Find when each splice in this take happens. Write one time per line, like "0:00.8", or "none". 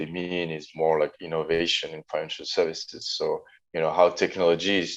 0:03.6

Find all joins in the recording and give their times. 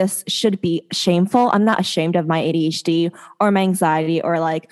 none

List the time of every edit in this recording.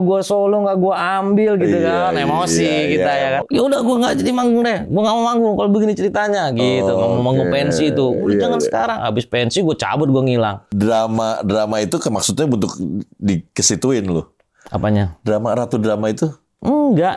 0:03.4
0:10.6

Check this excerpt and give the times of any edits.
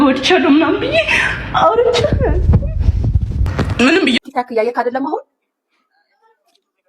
0:04.2

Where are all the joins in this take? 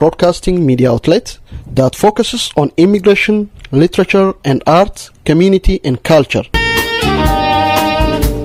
none

